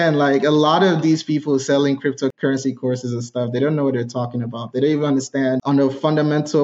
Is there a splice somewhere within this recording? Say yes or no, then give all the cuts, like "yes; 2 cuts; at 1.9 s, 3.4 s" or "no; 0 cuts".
yes; 2 cuts; at 2.4 s, 5.6 s